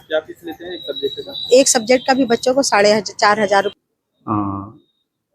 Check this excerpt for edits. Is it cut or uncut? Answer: cut